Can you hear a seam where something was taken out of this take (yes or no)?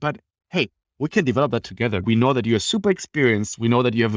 yes